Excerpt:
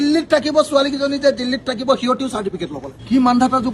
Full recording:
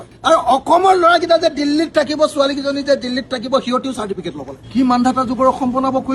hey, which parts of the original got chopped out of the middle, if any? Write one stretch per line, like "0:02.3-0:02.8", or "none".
none

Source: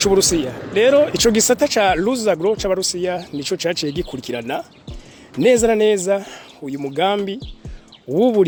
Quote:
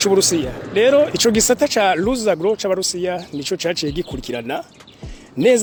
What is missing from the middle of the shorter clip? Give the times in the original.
none

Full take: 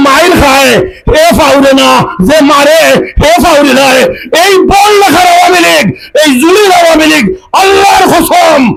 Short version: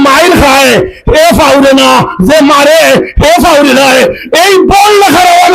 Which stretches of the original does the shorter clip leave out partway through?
none

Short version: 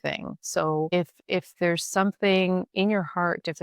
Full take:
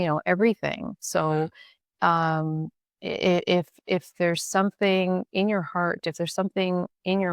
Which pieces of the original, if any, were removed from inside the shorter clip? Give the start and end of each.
0:01.5-0:03.5

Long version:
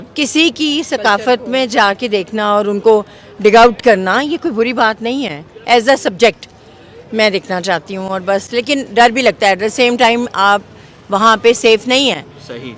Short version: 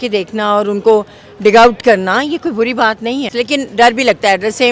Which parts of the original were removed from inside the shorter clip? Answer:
0:05.3-0:08.5

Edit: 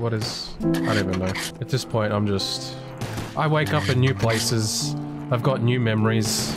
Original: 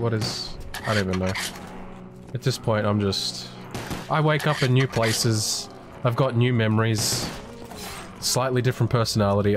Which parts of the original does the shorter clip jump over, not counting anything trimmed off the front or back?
0:01.5-0:02.2

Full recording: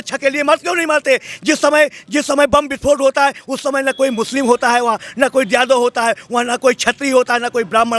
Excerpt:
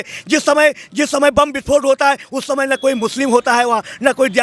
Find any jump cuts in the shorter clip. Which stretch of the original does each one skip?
none

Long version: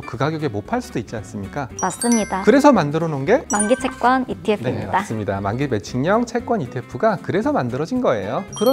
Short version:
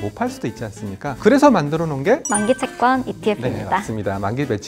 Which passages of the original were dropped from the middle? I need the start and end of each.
0:01.7-0:02.4

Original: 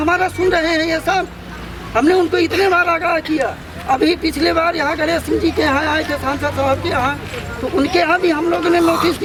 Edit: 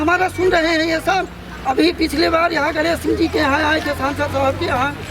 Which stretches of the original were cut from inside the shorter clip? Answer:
0:01.5-0:03.7

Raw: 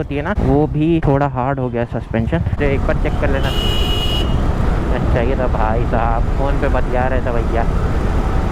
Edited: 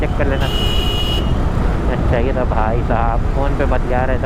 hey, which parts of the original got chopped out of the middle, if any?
none

